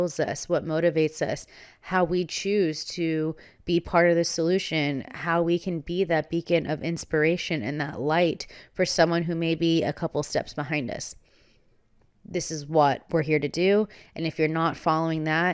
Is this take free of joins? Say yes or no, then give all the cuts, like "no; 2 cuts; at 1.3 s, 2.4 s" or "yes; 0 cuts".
yes; 0 cuts